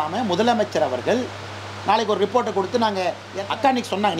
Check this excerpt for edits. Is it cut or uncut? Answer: cut